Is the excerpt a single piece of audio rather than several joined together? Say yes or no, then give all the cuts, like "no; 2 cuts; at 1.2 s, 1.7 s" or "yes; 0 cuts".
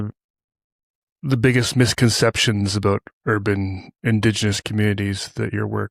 yes; 0 cuts